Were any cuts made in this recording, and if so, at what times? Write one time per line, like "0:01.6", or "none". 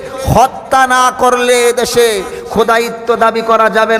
none